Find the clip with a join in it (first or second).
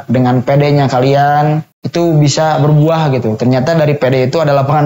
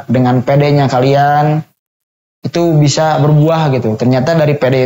first